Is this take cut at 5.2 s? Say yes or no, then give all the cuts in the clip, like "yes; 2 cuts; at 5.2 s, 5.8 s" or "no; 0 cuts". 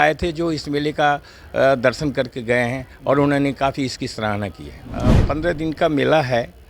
yes; 1 cut; at 5.2 s